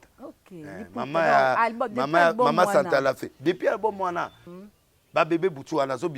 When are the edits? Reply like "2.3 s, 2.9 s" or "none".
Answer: 4.4 s